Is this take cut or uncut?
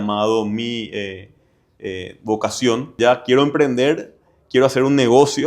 cut